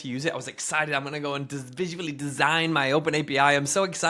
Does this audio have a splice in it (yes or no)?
no